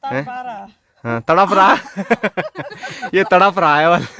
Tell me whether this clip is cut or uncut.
uncut